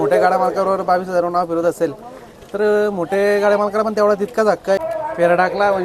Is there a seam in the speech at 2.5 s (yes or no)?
no